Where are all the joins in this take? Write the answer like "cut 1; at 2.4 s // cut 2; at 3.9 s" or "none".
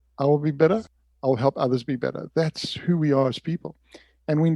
cut 1; at 0.9 s